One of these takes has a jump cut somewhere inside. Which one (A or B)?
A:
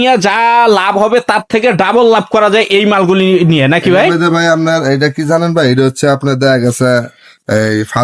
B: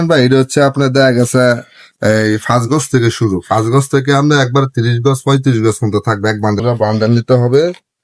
B